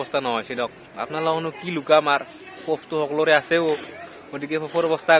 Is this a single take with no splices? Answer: yes; 0 cuts

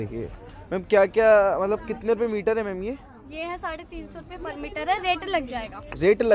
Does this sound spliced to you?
no; 0 cuts

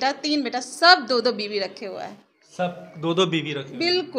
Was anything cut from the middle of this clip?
no; 0 cuts

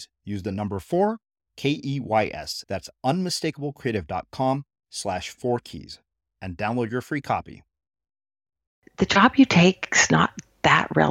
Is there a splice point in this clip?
yes; 1 cut; at 8.8 s

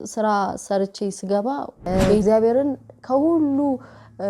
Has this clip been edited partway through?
yes; 1 cut; at 2.2 s

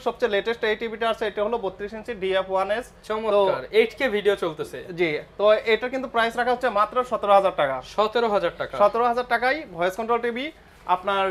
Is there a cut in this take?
no; 0 cuts

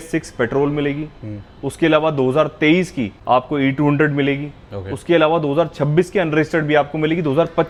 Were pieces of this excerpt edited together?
no; 0 cuts

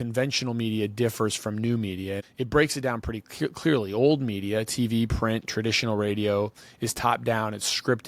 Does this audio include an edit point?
yes; 1 cut; at 2.3 s

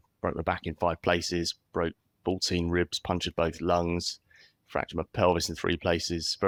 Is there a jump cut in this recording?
no; 0 cuts

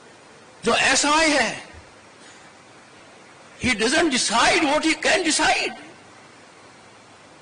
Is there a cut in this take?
no; 0 cuts

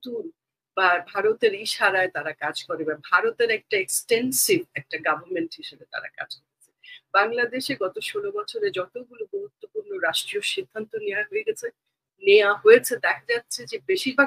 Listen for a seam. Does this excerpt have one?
no; 0 cuts

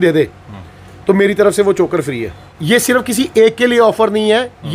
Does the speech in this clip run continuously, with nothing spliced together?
no; 1 cut; at 2.6 s

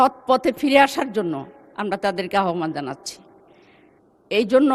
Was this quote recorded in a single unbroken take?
yes; 0 cuts

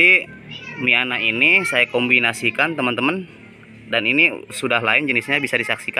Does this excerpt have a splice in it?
no; 0 cuts

